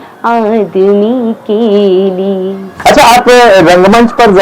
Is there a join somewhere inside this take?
yes; 1 cut; at 2.6 s

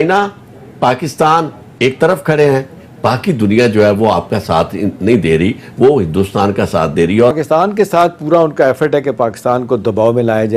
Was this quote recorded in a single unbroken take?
no; 1 cut; at 7.4 s

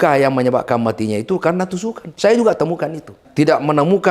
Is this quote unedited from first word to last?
no; 2 cuts; at 2.0 s, 3.2 s

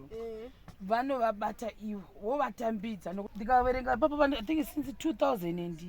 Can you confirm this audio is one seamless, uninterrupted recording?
no; 1 cut; at 3.3 s

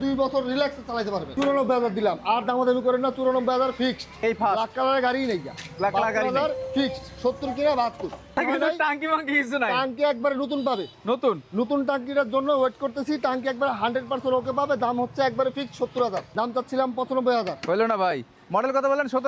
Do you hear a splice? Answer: yes; 4 cuts; at 1.3 s, 4.1 s, 8.4 s, 16.2 s

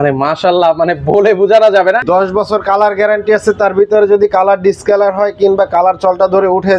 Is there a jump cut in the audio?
yes; 1 cut; at 2.0 s

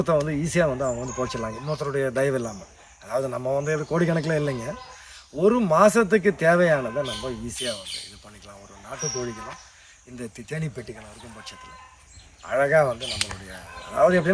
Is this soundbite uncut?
yes; 0 cuts

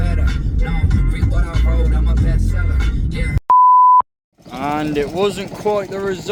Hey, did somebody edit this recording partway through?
no; 0 cuts

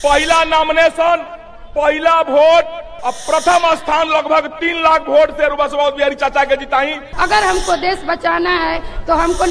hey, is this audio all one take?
no; 1 cut; at 7.0 s

